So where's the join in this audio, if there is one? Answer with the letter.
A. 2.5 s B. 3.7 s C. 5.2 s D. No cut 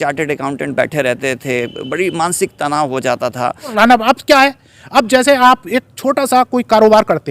B